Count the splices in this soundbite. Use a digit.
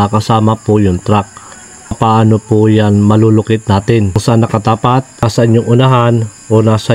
3